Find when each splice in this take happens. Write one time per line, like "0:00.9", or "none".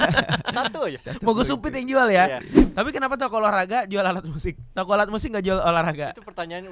0:02.5